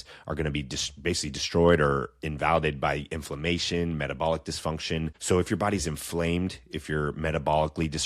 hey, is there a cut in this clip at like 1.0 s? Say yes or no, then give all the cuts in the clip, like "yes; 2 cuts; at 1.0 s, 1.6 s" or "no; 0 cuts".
no; 1 cut; at 5.1 s